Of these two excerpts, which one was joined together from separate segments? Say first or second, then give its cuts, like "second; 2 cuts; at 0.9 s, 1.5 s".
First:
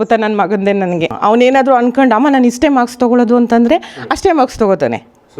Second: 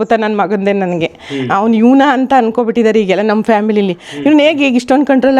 first; 1 cut; at 1.2 s